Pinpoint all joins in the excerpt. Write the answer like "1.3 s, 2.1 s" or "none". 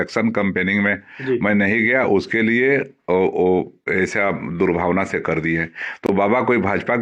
none